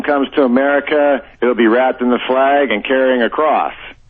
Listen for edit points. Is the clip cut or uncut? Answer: uncut